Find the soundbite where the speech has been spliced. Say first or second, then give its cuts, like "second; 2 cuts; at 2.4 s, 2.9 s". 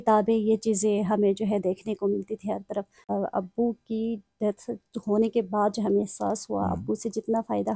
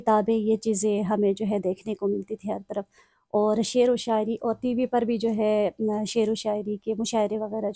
first; 1 cut; at 3.1 s